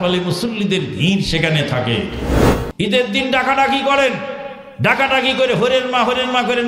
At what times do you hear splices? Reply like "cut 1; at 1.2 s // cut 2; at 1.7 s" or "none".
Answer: cut 1; at 2.3 s